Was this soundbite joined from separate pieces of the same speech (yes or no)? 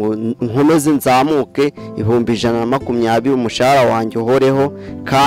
no